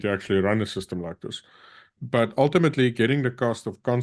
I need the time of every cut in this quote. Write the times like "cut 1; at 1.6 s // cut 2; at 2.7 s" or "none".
cut 1; at 1.9 s